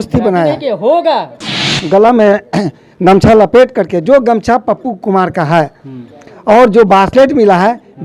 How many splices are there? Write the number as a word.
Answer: one